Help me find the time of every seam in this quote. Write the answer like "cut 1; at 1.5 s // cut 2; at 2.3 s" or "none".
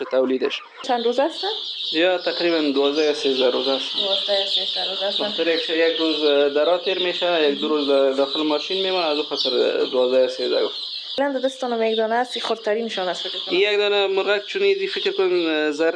cut 1; at 0.8 s // cut 2; at 11.2 s